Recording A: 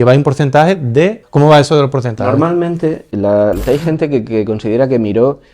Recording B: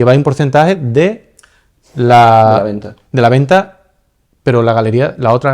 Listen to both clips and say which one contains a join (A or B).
A